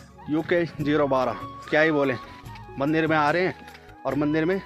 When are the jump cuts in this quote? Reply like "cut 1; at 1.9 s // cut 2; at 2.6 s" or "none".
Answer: cut 1; at 1.5 s